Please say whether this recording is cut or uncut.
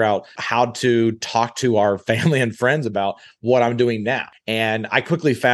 cut